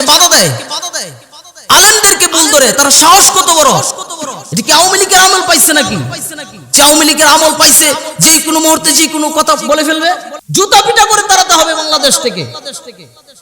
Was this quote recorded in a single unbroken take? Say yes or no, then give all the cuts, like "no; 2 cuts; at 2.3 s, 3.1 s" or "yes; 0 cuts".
no; 1 cut; at 10.3 s